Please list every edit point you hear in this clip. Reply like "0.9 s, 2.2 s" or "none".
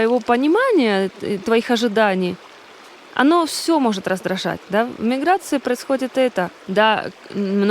6.5 s